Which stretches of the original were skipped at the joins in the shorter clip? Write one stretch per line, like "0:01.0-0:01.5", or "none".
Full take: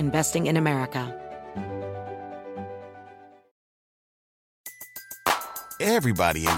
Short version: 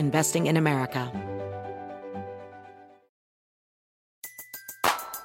0:01.1-0:01.5